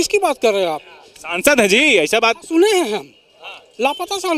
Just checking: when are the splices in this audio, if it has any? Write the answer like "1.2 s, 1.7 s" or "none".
none